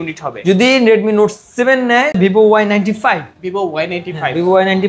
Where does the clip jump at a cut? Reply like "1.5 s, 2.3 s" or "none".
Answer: 2.2 s